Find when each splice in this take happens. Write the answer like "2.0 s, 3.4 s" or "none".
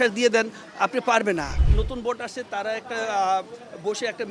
1.5 s